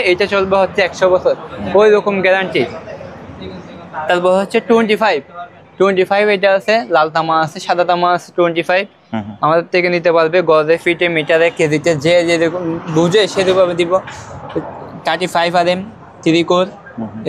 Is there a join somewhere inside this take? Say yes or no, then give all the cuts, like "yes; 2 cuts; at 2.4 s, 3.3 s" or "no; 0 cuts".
no; 0 cuts